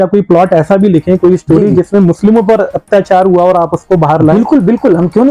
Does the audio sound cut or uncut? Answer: uncut